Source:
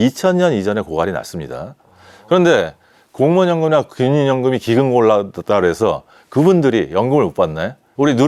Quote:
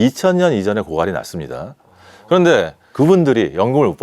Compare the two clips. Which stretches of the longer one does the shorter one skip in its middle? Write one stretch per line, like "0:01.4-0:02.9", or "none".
0:02.8-0:06.2